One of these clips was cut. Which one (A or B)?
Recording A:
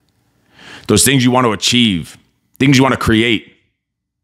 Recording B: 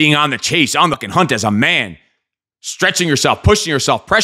B